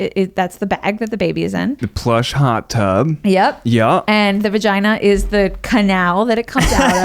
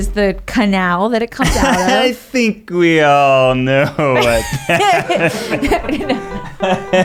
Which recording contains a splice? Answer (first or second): first